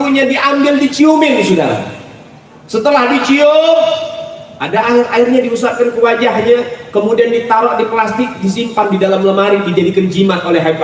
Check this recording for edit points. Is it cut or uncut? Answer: uncut